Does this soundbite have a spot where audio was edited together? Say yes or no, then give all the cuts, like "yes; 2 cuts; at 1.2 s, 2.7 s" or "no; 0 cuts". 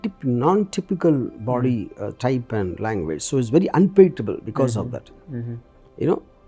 no; 0 cuts